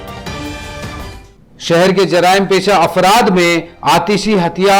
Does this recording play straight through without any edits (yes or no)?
no